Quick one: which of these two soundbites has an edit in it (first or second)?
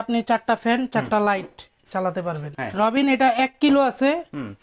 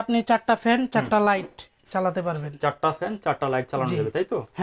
first